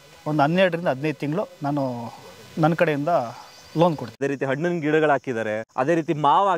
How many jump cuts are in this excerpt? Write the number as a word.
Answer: two